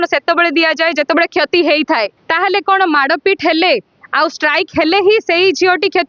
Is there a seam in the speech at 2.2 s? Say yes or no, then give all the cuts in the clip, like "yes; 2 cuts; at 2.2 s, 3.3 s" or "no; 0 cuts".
yes; 1 cut; at 2.2 s